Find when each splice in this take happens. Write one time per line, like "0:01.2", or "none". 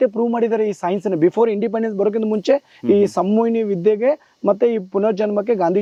none